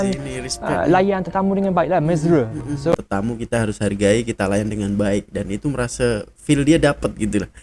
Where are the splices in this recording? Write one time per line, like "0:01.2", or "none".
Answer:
0:02.9